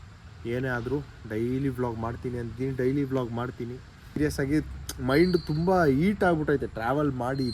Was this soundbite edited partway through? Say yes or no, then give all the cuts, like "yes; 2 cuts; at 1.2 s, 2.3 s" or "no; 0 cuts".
yes; 1 cut; at 4.2 s